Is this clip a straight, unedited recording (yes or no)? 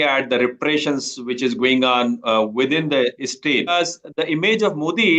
no